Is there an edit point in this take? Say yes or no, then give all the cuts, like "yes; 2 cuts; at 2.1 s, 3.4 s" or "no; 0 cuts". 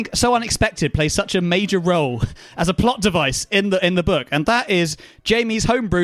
no; 0 cuts